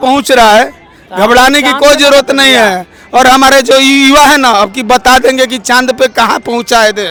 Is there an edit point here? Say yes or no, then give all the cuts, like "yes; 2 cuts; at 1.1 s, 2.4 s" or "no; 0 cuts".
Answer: no; 0 cuts